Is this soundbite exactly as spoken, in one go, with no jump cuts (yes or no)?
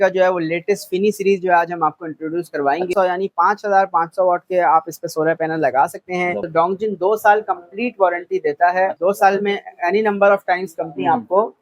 no